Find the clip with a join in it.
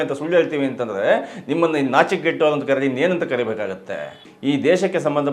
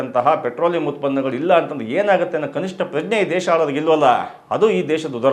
first; 1 cut; at 4.2 s

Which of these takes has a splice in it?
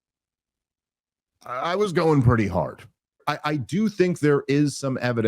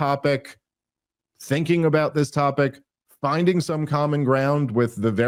first; 1 cut; at 3.2 s

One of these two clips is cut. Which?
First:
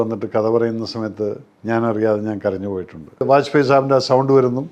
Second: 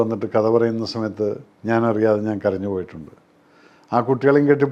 first; 1 cut; at 3.2 s

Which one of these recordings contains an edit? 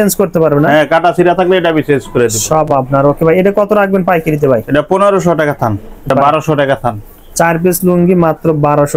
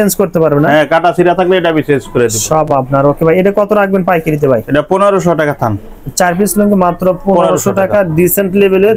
first; 1 cut; at 6.1 s

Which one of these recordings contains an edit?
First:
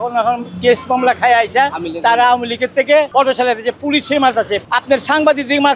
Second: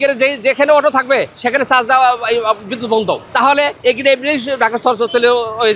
first; 2 cuts; at 3.1 s, 4.6 s

